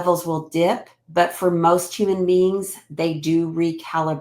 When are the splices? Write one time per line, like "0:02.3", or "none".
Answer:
0:00.9